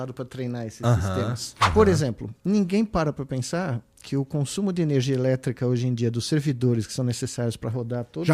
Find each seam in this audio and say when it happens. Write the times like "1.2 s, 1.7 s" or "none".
1.6 s